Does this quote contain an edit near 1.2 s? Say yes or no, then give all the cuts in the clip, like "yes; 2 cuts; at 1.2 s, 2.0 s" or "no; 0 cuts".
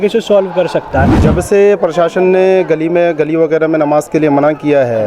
yes; 1 cut; at 1.2 s